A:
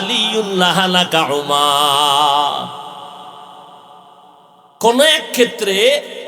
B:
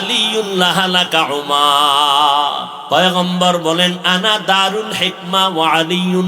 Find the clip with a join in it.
B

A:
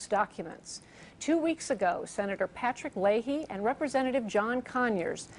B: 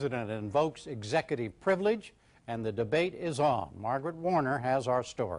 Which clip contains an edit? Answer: A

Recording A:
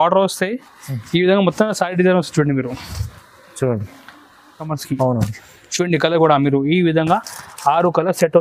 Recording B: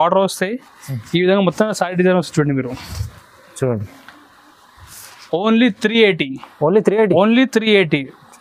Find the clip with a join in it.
A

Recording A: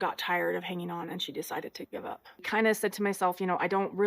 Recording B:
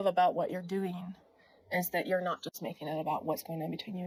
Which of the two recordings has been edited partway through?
A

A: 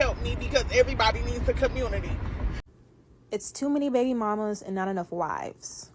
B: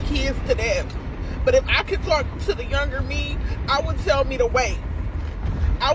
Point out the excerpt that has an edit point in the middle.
A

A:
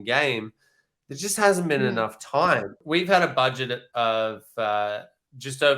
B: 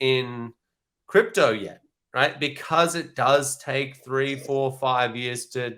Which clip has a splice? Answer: A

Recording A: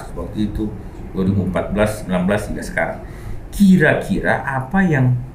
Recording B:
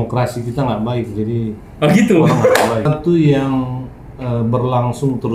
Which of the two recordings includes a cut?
B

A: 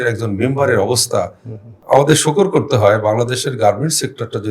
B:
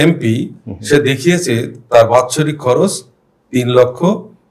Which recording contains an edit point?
A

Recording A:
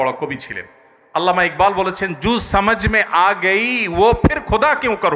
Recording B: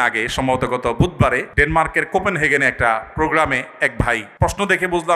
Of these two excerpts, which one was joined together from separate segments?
B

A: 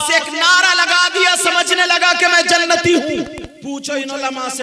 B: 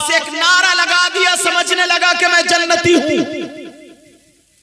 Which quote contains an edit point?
A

